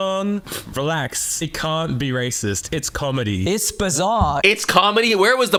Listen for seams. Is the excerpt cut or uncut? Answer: uncut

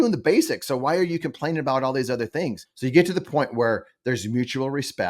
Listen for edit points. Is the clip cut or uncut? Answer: cut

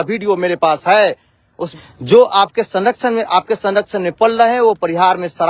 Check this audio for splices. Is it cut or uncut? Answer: cut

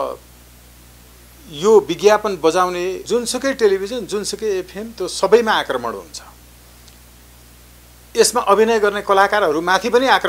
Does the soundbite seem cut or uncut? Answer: cut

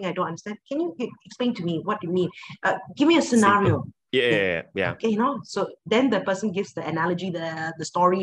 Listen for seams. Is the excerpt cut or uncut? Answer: uncut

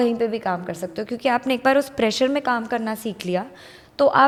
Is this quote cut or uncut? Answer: uncut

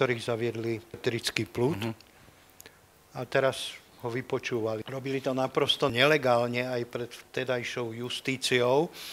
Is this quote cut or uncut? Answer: cut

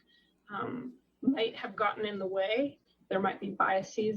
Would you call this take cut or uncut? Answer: cut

